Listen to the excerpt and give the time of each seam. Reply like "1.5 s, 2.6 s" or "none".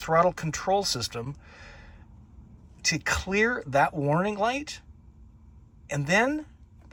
none